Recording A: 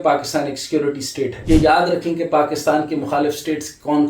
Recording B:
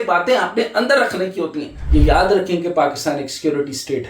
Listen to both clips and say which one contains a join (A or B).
B